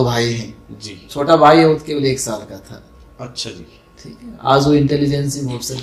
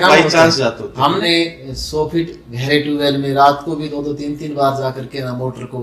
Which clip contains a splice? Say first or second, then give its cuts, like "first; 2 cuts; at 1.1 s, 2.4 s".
second; 1 cut; at 1.2 s